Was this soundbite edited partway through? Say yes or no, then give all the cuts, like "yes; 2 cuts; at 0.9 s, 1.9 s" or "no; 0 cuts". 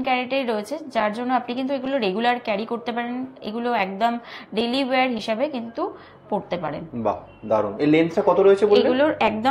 no; 0 cuts